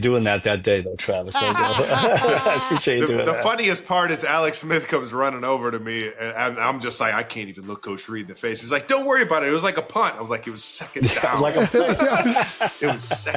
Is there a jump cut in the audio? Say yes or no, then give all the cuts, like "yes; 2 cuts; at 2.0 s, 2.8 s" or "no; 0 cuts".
no; 0 cuts